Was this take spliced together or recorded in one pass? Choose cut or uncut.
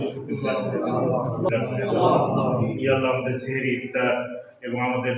cut